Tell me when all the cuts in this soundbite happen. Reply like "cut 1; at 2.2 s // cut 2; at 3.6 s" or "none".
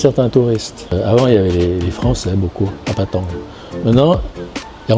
cut 1; at 0.9 s

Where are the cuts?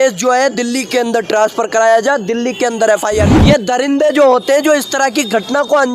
cut 1; at 3.3 s

